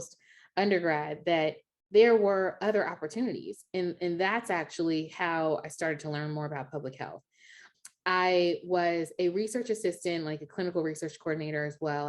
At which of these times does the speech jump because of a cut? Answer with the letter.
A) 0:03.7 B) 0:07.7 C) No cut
B